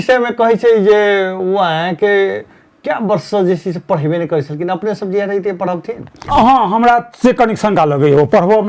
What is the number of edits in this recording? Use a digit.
1